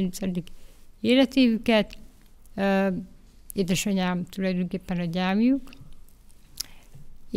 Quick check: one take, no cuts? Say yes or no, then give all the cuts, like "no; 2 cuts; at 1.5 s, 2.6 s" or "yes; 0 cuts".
yes; 0 cuts